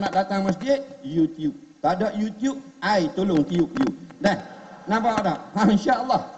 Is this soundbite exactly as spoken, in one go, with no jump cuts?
yes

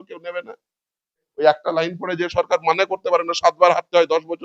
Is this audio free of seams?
no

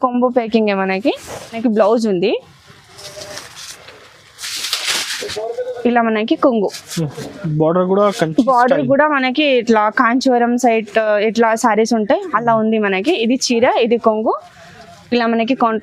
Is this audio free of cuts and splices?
no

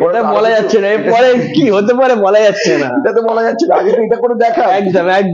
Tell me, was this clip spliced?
no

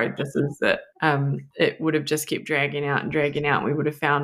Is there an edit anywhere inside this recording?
yes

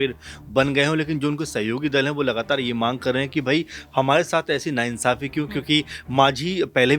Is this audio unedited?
yes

